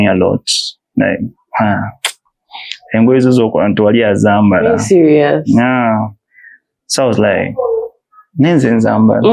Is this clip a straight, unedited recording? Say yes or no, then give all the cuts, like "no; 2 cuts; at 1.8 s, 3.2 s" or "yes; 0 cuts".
yes; 0 cuts